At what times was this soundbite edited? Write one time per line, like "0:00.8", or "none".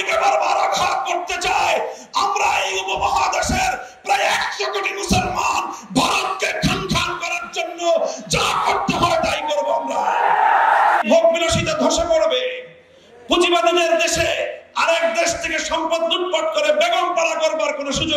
0:11.0